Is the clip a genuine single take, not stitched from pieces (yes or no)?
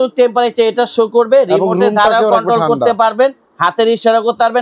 yes